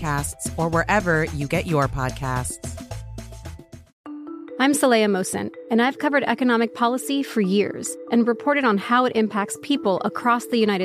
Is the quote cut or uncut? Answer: cut